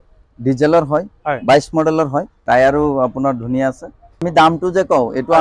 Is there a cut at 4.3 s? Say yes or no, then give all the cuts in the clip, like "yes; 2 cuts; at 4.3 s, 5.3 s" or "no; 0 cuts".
yes; 2 cuts; at 2.3 s, 4.3 s